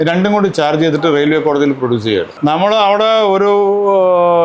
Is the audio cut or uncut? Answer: cut